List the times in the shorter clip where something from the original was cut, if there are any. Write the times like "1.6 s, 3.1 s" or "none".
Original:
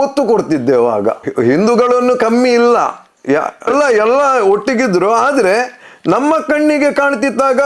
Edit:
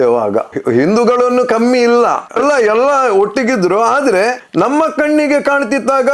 2.3 s, 4.4 s